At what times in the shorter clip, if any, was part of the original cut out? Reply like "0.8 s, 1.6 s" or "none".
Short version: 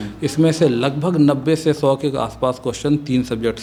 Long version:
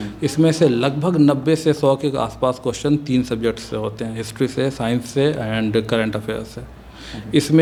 none